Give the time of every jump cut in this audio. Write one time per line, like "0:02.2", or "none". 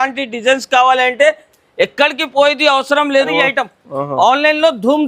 0:03.3